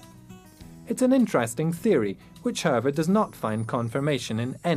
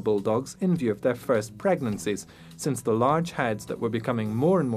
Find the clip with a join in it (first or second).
first